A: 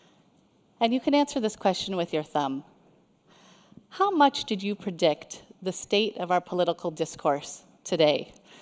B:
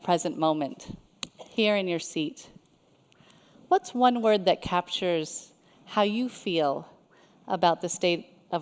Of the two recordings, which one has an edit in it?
B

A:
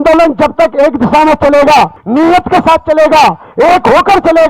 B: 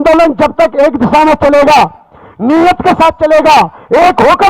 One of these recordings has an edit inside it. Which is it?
A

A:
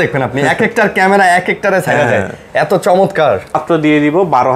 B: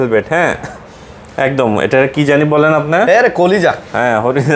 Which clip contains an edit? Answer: A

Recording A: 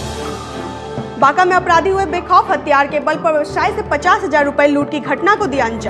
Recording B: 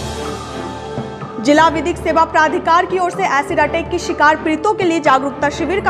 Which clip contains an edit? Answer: B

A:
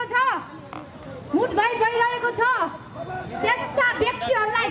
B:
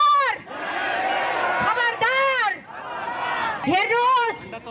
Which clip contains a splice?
B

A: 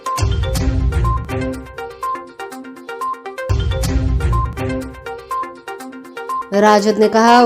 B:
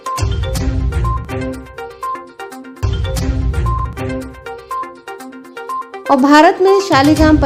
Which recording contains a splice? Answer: A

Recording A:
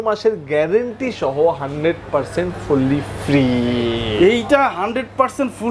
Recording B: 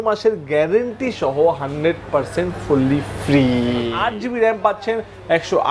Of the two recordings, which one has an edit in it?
B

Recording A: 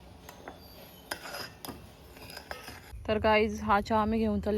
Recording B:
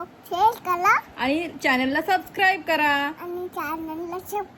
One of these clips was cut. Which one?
A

